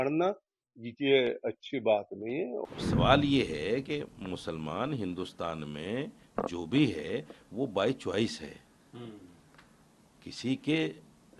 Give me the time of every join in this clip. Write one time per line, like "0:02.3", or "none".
0:02.6